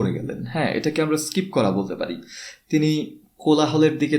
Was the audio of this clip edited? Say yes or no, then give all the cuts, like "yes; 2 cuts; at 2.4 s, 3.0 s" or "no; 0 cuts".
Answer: no; 0 cuts